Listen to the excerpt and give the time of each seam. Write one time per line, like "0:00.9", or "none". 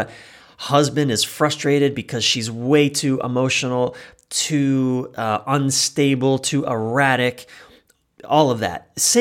none